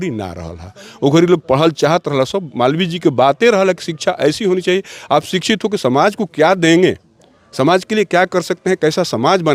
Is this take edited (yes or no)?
no